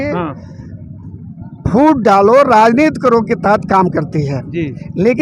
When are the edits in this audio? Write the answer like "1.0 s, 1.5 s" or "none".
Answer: none